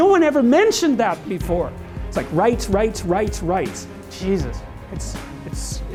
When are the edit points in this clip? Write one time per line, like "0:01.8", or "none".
none